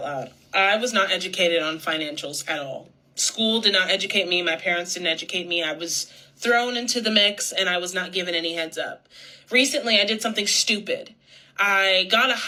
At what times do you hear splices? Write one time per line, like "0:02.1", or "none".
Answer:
none